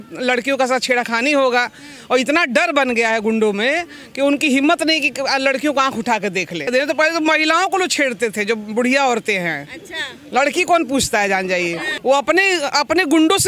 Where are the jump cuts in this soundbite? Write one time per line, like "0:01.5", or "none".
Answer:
0:06.7
0:11.9